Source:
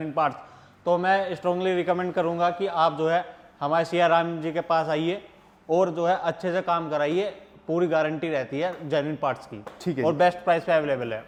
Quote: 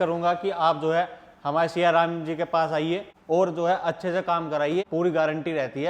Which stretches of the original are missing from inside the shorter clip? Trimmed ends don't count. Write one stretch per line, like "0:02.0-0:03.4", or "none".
0:05.3-0:05.5
0:07.3-0:07.6